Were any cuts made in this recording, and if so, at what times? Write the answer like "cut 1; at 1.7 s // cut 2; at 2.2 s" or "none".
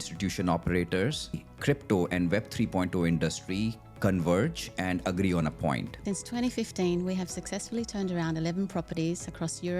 cut 1; at 1.5 s // cut 2; at 6.3 s